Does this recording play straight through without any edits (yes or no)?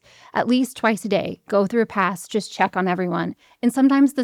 yes